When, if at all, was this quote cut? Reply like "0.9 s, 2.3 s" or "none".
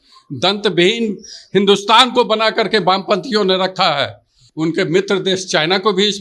4.4 s